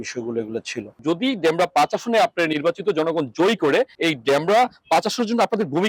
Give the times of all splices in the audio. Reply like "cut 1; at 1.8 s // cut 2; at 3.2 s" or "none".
cut 1; at 1.0 s // cut 2; at 3.9 s